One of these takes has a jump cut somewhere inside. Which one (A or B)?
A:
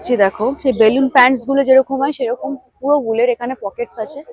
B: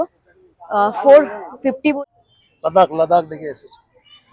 B